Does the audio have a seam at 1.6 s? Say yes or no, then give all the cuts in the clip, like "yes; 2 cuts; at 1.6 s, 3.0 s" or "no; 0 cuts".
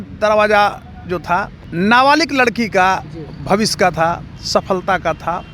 yes; 1 cut; at 1.6 s